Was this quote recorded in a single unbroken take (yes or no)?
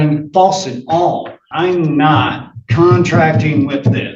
no